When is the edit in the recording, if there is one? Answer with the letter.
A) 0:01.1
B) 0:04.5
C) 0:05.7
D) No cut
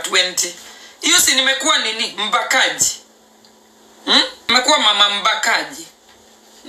B